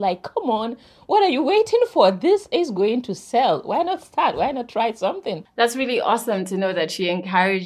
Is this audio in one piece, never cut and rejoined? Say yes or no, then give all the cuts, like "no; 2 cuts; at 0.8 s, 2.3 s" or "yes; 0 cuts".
yes; 0 cuts